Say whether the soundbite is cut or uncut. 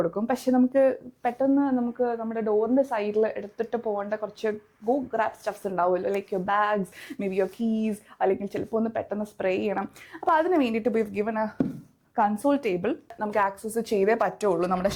cut